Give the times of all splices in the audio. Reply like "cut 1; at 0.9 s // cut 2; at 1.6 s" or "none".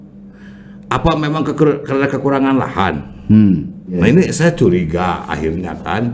cut 1; at 4.0 s